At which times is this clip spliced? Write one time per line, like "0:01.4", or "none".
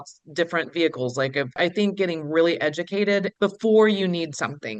0:01.5
0:03.3